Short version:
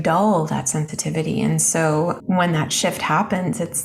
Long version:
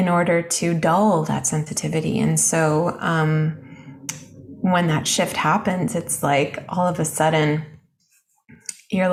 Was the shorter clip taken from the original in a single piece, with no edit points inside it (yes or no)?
no